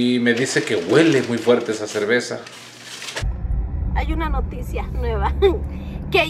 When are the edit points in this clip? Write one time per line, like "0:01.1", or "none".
0:03.3

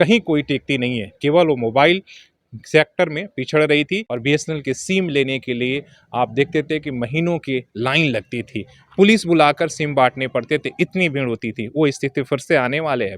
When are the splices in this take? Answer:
0:04.1

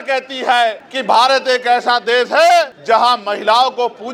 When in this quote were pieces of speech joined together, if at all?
none

